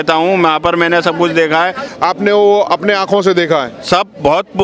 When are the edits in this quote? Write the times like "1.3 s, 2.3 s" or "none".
1.8 s